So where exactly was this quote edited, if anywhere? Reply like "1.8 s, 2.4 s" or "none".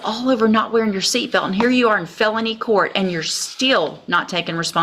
none